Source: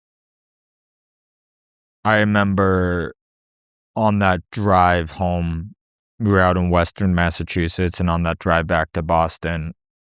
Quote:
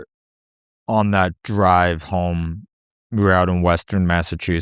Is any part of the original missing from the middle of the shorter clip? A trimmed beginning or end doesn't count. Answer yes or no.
no